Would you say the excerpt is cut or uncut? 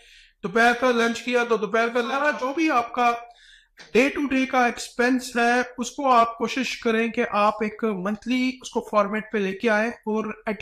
cut